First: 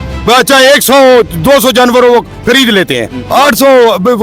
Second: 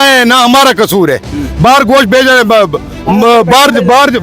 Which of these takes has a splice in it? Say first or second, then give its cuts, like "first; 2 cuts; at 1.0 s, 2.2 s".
first; 1 cut; at 3.2 s